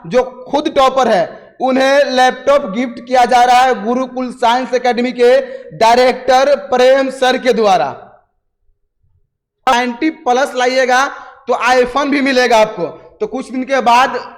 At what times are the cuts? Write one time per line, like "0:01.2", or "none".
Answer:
0:09.7